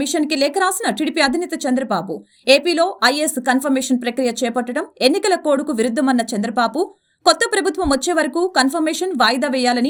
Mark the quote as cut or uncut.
uncut